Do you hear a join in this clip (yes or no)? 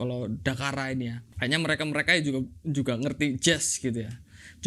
yes